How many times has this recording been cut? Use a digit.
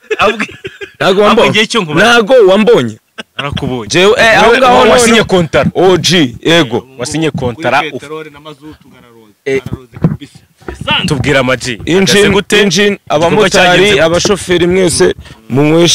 1